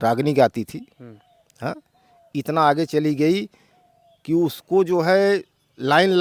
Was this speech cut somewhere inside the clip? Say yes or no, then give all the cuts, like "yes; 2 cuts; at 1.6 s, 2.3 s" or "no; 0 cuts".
no; 0 cuts